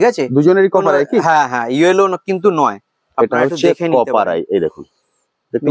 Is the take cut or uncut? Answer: uncut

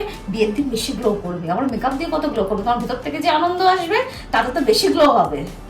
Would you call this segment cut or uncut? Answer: uncut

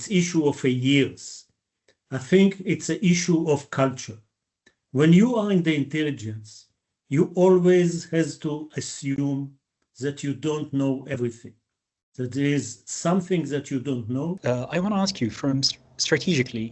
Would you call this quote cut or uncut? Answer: cut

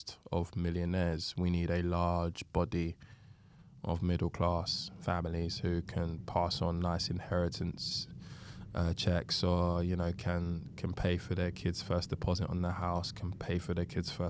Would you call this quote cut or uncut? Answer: uncut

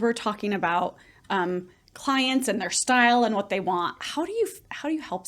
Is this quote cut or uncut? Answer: uncut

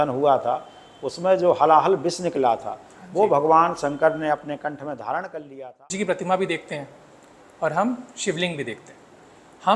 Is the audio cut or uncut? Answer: cut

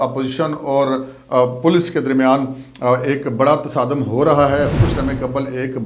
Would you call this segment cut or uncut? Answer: cut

